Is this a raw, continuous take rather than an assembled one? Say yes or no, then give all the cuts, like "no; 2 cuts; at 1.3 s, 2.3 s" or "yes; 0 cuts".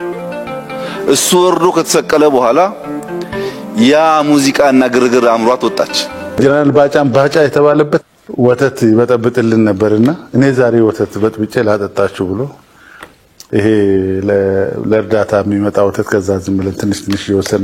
no; 1 cut; at 6.3 s